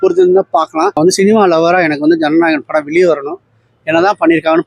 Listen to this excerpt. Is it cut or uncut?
cut